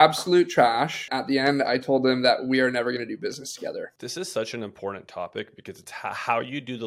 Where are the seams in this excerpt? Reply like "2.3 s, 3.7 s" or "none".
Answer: 1.1 s, 3.9 s